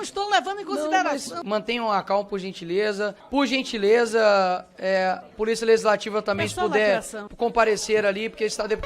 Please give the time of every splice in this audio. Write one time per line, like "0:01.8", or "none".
0:01.4
0:03.2
0:07.2